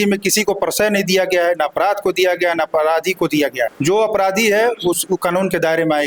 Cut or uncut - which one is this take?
uncut